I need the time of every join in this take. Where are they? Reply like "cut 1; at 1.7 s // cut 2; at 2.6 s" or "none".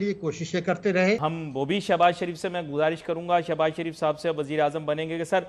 cut 1; at 1.2 s